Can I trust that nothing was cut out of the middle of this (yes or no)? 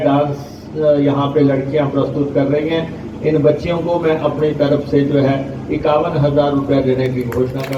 yes